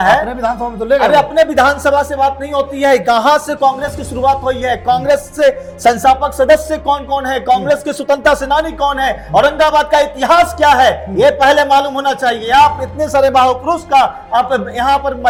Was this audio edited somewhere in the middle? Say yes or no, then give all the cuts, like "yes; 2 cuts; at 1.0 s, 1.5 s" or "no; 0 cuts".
no; 0 cuts